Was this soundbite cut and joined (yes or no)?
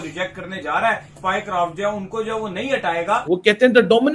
yes